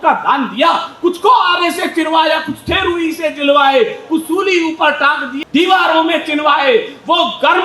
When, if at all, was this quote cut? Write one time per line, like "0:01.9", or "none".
0:05.4